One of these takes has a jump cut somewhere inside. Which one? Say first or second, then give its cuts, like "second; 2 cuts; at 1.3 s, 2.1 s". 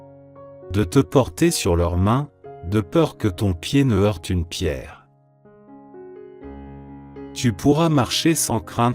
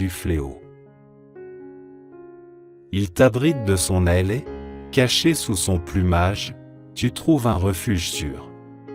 first; 2 cuts; at 5.0 s, 7.3 s